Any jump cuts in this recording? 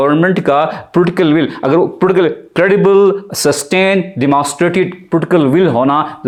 no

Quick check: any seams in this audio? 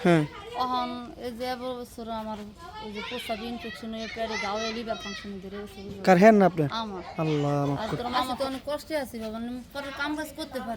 yes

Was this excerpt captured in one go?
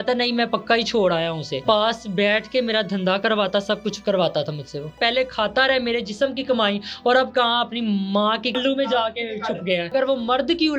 no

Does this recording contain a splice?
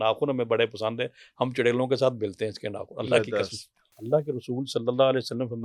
yes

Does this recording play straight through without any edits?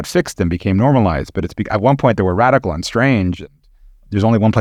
yes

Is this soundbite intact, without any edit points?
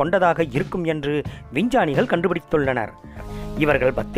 no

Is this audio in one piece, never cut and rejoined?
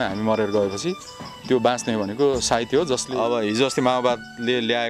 no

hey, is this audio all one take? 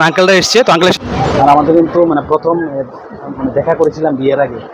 no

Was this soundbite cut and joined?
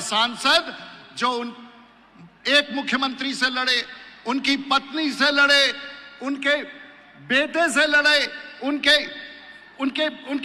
no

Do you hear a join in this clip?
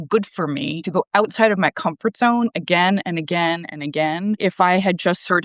yes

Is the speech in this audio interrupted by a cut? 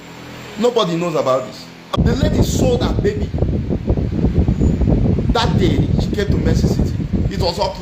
yes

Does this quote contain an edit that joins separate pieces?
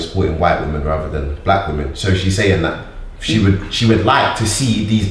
no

